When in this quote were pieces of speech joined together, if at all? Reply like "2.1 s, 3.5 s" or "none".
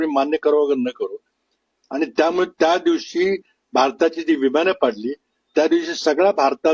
none